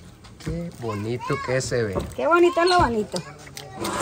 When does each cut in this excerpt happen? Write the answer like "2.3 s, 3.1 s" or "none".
none